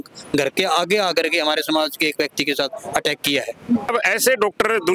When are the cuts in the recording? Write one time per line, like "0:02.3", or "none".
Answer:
0:03.9